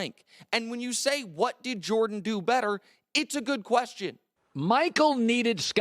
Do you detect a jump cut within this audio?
yes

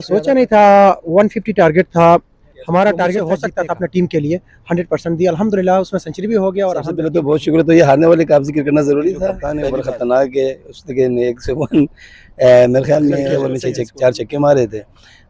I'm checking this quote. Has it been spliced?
yes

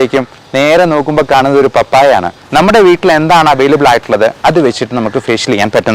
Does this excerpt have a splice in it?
yes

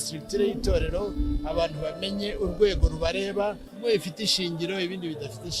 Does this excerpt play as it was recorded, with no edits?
no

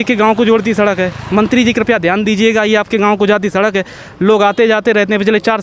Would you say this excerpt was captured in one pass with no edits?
yes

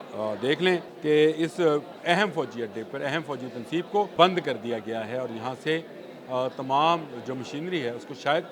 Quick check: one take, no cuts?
no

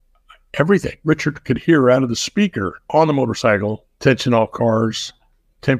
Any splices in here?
yes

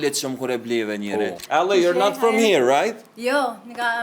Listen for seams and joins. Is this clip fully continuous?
no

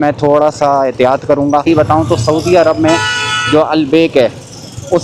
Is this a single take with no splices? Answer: no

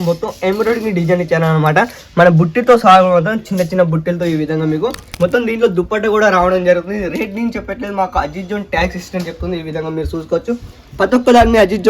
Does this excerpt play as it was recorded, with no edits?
no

